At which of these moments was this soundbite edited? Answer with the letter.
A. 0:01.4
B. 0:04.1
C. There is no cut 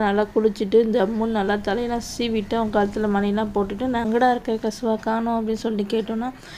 B